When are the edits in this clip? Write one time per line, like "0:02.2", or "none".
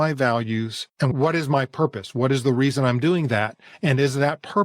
0:01.1